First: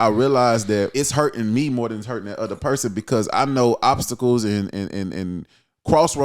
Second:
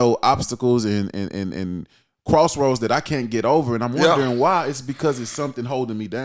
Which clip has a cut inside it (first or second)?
first